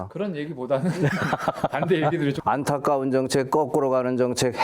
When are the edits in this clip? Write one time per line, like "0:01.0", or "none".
0:02.4